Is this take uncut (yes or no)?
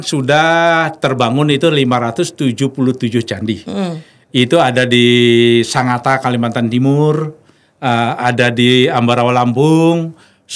yes